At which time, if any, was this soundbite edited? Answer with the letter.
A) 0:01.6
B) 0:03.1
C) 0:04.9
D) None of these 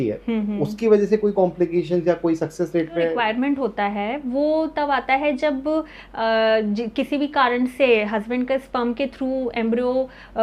B